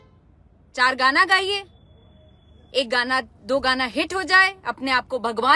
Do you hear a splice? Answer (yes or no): no